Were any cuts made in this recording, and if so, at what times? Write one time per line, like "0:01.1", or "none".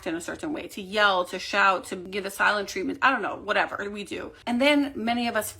0:02.1
0:04.3